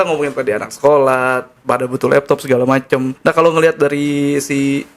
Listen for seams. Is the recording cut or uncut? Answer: cut